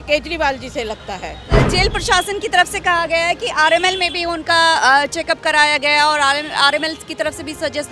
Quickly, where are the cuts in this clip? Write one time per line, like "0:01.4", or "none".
0:01.5